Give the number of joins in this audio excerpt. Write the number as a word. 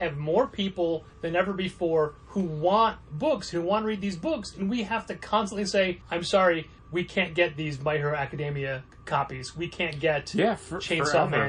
five